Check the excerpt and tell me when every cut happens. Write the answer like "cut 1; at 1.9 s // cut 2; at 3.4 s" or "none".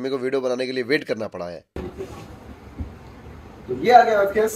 cut 1; at 1.4 s